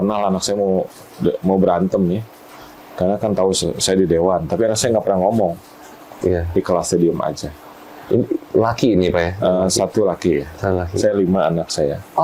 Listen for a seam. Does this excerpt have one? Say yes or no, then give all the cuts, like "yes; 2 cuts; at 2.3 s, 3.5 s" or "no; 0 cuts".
no; 0 cuts